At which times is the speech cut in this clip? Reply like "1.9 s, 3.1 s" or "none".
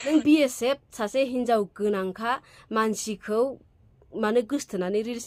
none